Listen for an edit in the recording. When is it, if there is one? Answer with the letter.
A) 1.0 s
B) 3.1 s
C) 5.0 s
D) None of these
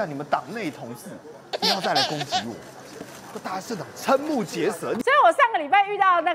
C